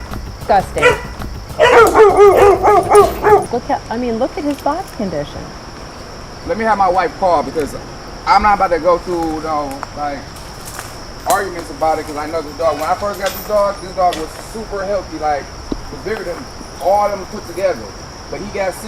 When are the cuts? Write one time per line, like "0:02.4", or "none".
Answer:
0:03.5